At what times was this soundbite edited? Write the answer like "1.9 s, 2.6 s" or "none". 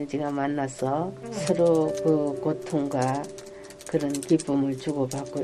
1.2 s